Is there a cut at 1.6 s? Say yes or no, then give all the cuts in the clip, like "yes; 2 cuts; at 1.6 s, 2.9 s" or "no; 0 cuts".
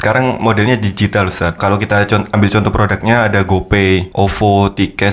yes; 2 cuts; at 1.6 s, 4.1 s